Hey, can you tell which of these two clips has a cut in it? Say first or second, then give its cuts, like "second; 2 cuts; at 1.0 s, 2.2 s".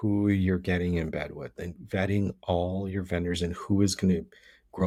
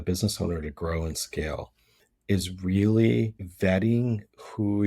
second; 1 cut; at 3.4 s